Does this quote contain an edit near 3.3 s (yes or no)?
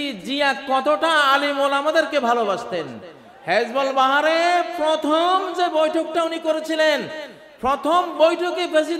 no